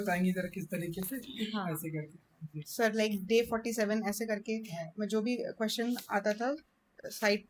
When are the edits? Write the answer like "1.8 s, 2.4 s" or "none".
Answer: none